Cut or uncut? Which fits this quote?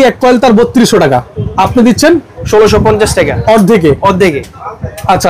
uncut